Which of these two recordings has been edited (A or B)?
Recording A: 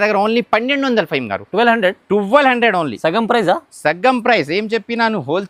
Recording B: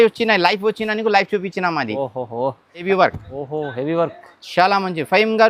B